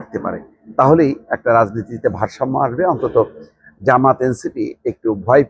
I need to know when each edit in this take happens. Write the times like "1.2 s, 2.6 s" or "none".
none